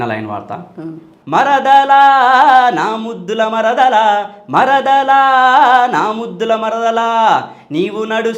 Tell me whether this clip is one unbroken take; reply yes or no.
no